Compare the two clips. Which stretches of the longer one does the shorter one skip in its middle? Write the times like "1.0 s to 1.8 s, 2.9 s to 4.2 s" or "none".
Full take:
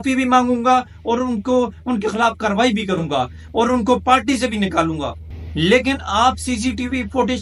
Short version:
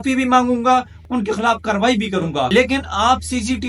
1.0 s to 1.7 s, 3.3 s to 5.7 s